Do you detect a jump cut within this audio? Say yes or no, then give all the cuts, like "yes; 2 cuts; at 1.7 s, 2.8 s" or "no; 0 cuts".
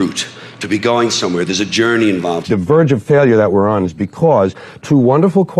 yes; 1 cut; at 2.4 s